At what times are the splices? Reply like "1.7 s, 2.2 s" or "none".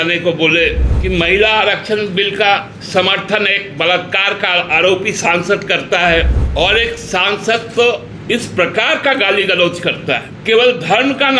0.9 s, 2.8 s, 6.4 s, 8.1 s, 10.3 s